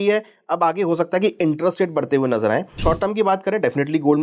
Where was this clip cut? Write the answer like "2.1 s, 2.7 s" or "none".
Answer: 2.8 s